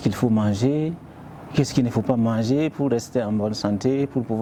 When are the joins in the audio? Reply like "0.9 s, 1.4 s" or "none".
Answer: none